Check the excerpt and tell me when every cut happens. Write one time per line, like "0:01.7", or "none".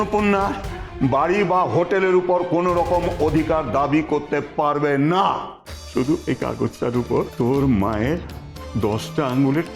0:06.2
0:07.3